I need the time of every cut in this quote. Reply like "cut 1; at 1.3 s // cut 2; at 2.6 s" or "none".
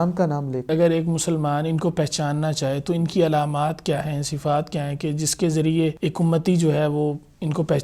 cut 1; at 0.7 s // cut 2; at 6.0 s